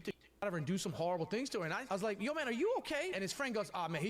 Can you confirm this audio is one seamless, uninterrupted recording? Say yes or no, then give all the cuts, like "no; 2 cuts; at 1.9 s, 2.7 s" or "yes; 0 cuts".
no; 2 cuts; at 1.8 s, 3.1 s